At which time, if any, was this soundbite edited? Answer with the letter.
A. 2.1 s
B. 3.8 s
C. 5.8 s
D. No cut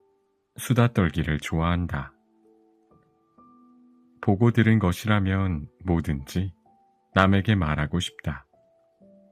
D